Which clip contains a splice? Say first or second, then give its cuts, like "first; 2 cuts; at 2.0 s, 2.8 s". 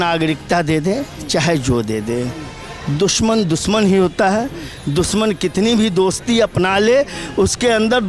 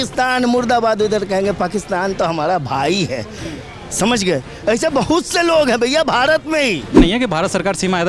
second; 1 cut; at 7.0 s